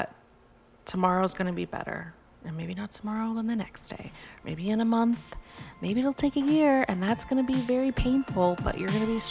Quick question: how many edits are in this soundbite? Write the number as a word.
zero